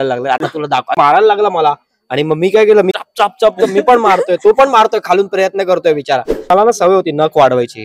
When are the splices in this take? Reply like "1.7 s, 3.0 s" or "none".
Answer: 0.9 s, 2.9 s, 6.5 s